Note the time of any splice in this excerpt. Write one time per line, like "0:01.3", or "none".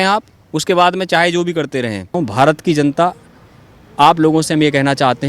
0:02.1